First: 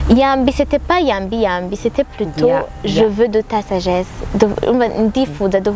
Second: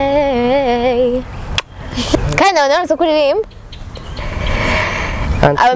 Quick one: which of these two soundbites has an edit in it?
second; 1 cut; at 2.2 s

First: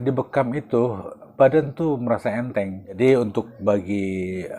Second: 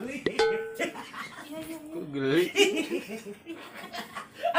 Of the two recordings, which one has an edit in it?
first; 2 cuts; at 1.2 s, 3.0 s

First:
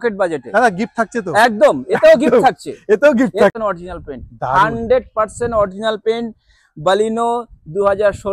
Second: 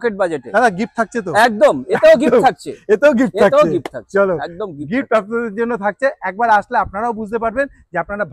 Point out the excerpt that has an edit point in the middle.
first; 1 cut; at 3.5 s

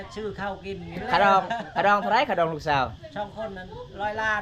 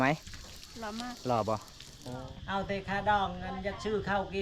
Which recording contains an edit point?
second; 1 cut; at 2.1 s

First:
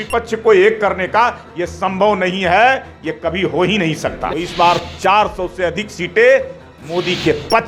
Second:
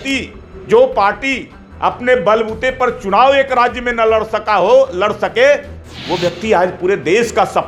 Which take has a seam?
first; 1 cut; at 4.2 s

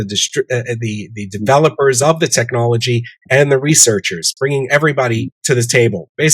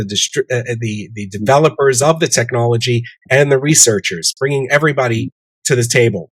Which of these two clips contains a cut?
first; 1 cut; at 5.3 s

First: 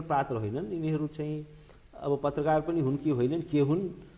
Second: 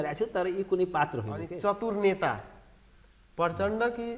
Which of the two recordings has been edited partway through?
second; 1 cut; at 1.4 s

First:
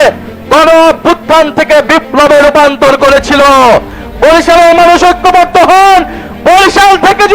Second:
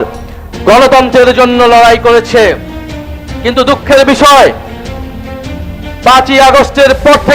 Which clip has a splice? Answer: first; 1 cut; at 4.0 s

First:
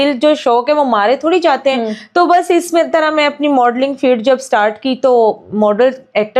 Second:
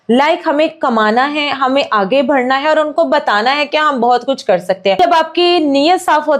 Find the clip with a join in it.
second; 1 cut; at 5.0 s

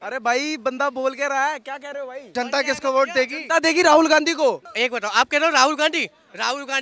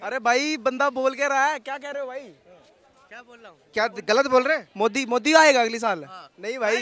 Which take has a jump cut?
first; 2 cuts; at 2.3 s, 4.6 s

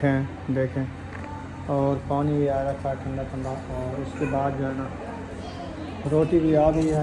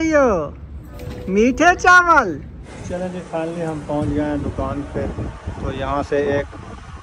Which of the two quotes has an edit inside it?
second; 1 cut; at 2.9 s

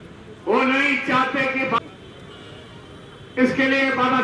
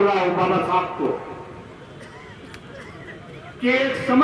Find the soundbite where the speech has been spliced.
first; 1 cut; at 1.8 s

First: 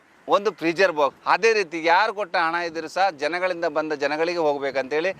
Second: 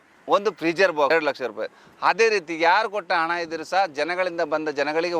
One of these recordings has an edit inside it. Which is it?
first; 1 cut; at 1.1 s

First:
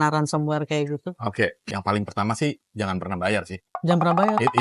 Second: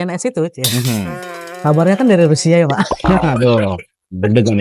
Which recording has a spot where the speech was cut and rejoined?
first; 1 cut; at 1.6 s

